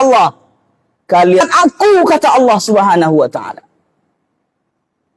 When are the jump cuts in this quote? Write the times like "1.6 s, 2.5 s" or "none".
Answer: 1.4 s